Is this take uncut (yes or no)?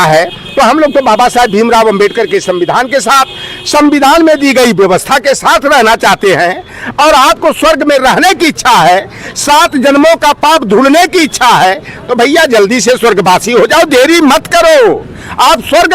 yes